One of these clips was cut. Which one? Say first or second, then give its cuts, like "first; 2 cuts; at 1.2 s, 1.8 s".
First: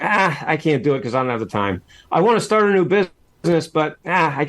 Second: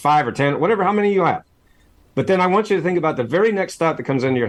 first; 1 cut; at 3.2 s